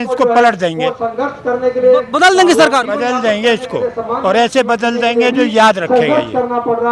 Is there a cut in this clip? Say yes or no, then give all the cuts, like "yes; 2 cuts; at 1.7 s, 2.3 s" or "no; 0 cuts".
no; 0 cuts